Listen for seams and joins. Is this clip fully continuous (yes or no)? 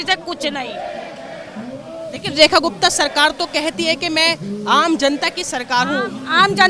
yes